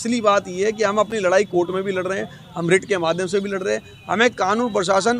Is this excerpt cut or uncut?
uncut